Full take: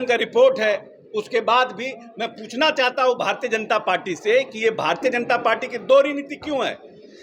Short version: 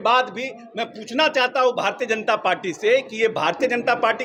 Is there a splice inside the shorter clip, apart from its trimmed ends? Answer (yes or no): no